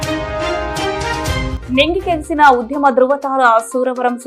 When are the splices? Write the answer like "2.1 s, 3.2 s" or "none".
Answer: none